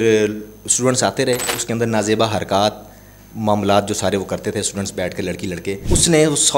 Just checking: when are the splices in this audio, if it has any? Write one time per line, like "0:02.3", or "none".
0:01.6
0:05.8